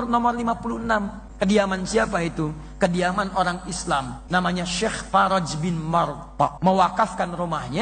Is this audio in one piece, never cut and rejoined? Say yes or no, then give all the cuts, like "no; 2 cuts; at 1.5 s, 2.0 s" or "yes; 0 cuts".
no; 3 cuts; at 1.2 s, 4.2 s, 6.5 s